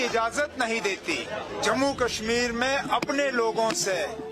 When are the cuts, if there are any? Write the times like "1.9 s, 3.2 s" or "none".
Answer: 1.6 s